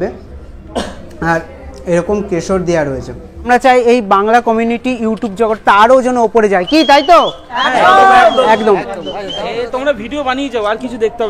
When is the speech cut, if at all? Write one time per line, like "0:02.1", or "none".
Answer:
0:03.5